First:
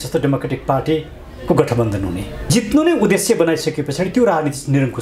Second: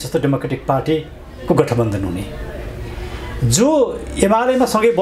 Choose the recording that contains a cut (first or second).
first